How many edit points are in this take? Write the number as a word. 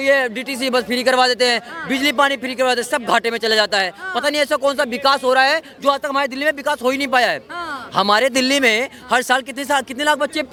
zero